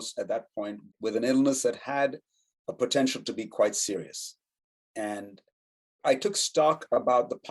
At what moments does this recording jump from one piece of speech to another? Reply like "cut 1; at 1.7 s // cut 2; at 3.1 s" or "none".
cut 1; at 0.9 s